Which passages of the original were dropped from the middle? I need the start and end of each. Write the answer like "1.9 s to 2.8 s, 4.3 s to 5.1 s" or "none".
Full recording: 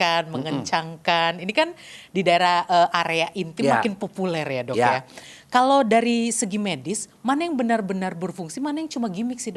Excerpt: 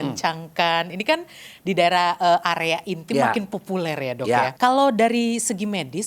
5.0 s to 5.5 s